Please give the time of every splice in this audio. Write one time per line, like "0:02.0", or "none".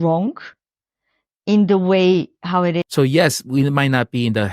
0:02.9